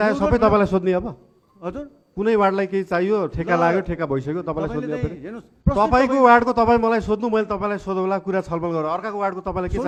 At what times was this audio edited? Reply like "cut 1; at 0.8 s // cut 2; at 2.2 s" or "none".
none

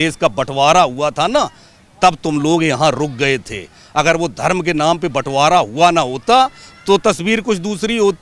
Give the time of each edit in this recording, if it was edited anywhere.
none

